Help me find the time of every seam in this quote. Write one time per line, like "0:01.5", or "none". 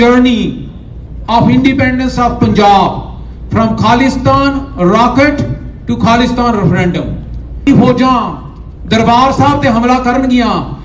0:07.7